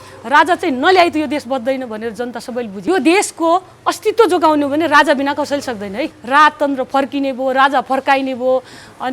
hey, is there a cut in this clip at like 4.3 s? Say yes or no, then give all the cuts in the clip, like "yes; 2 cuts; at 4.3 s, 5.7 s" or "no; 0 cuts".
no; 2 cuts; at 2.8 s, 6.2 s